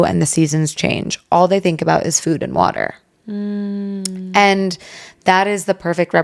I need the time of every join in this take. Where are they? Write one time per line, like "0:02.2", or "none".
none